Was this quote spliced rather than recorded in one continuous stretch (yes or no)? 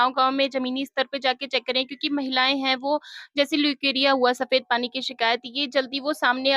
no